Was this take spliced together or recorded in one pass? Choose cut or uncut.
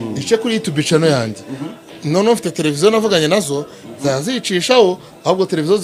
uncut